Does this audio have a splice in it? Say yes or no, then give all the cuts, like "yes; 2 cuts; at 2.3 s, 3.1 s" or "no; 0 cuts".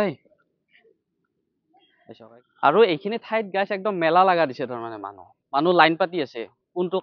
yes; 1 cut; at 2.2 s